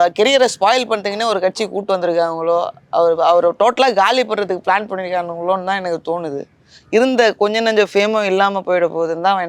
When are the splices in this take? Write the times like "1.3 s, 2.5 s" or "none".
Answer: none